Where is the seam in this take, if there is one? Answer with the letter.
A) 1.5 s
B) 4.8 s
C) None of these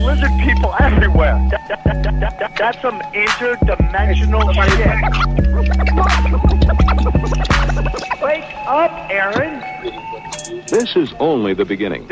C